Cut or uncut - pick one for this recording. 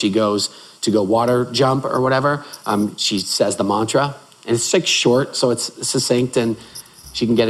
uncut